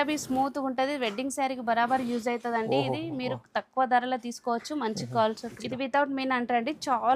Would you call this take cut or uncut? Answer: cut